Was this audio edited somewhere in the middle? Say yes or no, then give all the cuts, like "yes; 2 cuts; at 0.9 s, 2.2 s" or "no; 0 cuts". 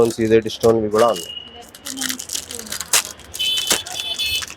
no; 0 cuts